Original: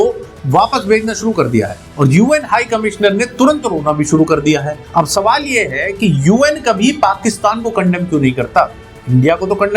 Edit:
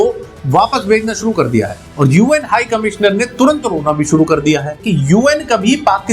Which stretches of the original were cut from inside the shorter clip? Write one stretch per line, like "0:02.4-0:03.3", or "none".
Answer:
0:04.8-0:05.9